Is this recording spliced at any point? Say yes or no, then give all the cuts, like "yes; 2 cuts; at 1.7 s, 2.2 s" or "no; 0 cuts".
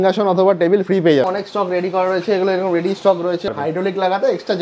yes; 2 cuts; at 1.3 s, 3.5 s